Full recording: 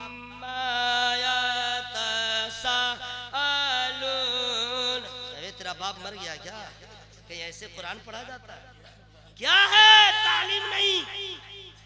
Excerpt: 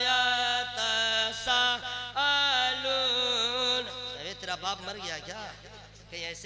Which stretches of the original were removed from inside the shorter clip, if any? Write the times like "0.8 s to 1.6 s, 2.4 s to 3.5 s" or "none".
none